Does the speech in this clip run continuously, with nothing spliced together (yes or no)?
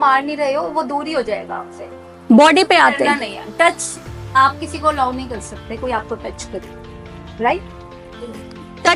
yes